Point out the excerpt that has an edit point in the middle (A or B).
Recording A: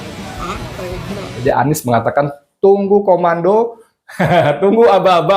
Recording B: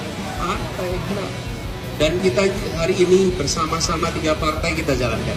A